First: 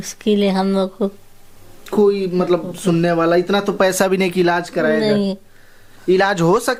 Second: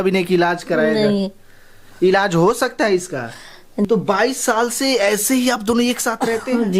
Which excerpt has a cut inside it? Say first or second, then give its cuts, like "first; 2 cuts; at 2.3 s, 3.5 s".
second; 1 cut; at 3.9 s